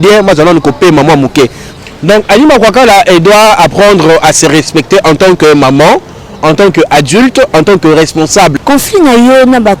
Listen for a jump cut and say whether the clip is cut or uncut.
cut